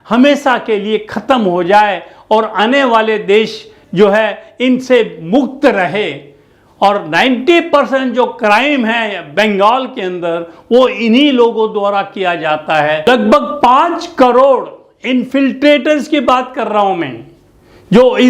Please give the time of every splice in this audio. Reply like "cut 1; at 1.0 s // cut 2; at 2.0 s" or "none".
cut 1; at 13.1 s